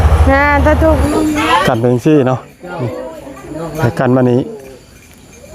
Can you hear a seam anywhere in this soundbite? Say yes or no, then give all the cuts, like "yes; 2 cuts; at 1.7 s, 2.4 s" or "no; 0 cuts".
yes; 1 cut; at 1.0 s